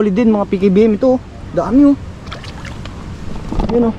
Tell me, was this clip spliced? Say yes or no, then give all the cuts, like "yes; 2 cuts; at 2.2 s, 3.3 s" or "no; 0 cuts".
no; 0 cuts